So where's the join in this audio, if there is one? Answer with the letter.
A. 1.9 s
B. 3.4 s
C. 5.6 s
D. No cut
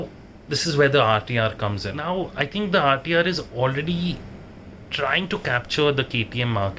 A